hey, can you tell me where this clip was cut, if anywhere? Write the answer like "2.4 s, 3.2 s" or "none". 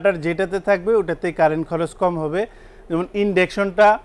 none